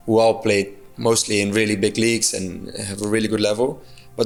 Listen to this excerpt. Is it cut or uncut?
uncut